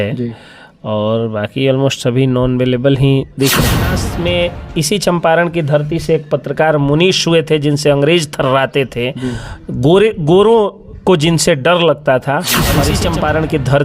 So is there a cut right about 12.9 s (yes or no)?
yes